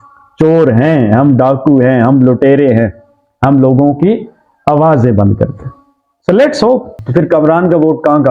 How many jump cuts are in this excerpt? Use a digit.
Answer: 1